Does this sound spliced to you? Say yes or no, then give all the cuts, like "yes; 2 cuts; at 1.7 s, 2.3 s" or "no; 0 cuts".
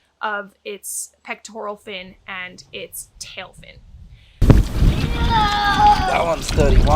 yes; 1 cut; at 4.4 s